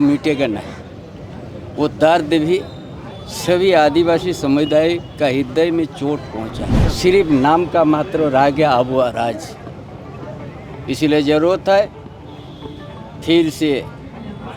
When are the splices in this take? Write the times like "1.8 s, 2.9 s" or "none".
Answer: 6.8 s